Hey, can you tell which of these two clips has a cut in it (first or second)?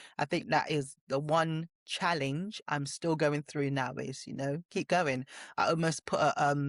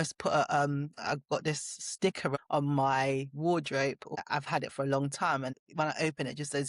second